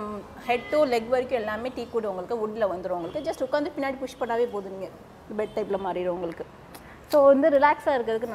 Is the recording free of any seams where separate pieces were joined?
yes; 0 cuts

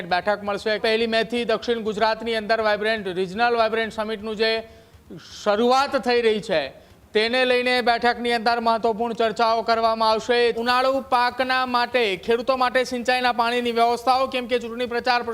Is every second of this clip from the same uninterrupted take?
no; 2 cuts; at 0.8 s, 10.6 s

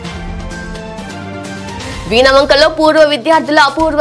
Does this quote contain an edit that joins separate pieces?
no; 0 cuts

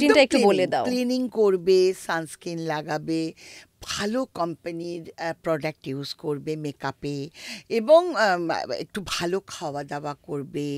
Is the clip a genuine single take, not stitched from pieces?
yes; 0 cuts

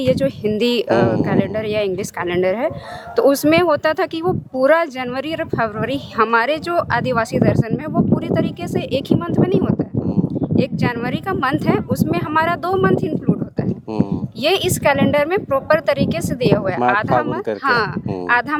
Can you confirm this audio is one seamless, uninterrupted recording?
yes; 0 cuts

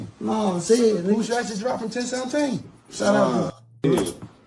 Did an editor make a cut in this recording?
yes; 1 cut; at 3.1 s

